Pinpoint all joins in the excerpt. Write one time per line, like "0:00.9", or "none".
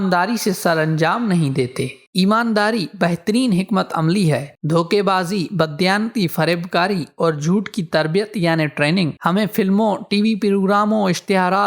none